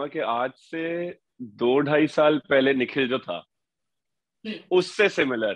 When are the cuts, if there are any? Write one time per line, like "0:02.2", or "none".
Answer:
none